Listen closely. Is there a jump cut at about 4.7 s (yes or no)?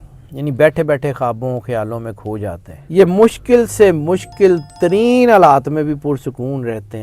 no